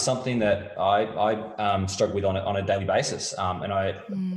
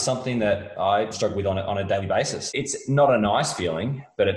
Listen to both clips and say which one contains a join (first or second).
second